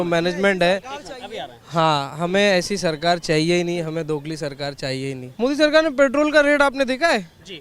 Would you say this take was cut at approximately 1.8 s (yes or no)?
no